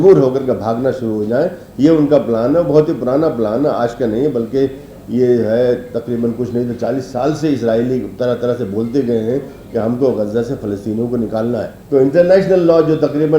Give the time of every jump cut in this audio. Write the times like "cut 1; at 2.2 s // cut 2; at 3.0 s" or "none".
cut 1; at 11.7 s